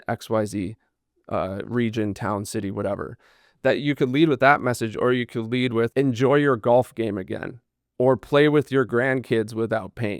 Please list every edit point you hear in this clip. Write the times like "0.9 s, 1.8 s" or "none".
5.9 s